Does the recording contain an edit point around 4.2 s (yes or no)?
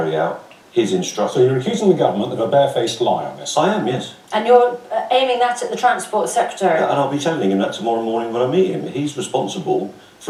no